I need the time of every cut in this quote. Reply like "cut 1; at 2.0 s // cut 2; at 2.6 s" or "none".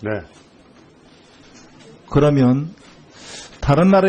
none